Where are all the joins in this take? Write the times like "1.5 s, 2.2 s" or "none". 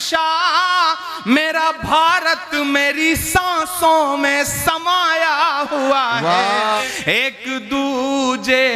6.8 s